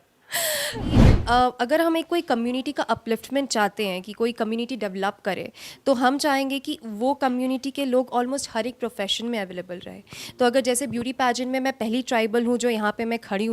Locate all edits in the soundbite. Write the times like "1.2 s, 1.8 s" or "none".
1.1 s